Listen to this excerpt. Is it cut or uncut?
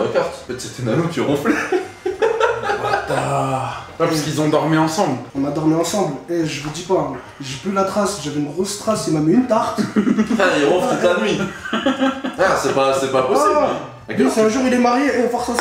uncut